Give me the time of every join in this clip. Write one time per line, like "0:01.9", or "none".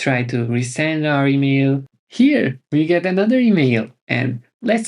0:01.9